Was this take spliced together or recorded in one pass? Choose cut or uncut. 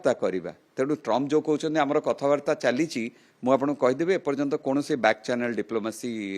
uncut